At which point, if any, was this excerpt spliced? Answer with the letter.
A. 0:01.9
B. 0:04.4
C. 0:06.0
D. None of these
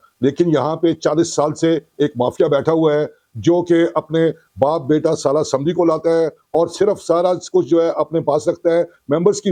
D